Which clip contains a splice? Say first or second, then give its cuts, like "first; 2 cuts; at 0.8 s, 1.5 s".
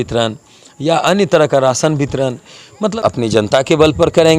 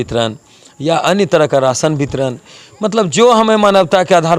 first; 1 cut; at 2.9 s